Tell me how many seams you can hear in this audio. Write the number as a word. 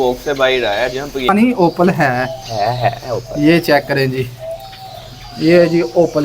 one